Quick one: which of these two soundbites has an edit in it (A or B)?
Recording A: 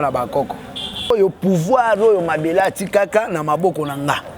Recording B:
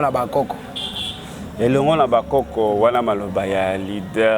A